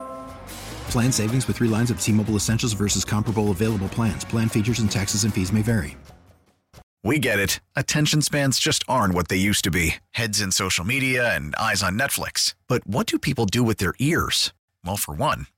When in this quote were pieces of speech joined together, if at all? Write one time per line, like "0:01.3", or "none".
0:06.8